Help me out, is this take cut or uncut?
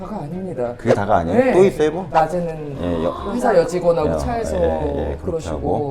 cut